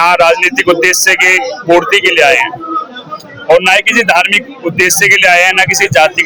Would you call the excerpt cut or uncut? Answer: uncut